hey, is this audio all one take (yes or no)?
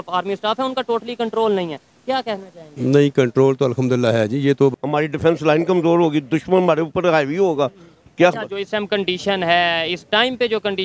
no